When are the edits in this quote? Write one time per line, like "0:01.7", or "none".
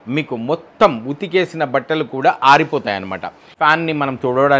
0:03.5